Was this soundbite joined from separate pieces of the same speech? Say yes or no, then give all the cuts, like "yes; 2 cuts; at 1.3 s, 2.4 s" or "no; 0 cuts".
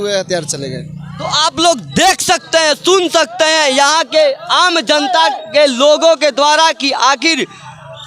no; 0 cuts